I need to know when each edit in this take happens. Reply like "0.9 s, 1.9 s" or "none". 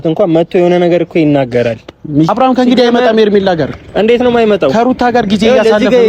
2.3 s